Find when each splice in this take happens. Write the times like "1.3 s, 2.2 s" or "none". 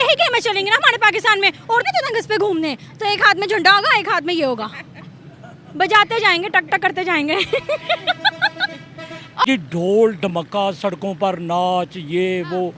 1.8 s, 9.5 s